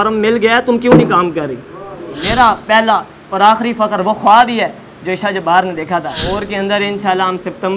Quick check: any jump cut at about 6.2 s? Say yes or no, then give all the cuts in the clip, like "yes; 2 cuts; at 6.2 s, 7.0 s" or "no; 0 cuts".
yes; 2 cuts; at 2.2 s, 6.2 s